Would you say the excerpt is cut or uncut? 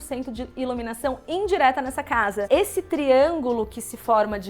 cut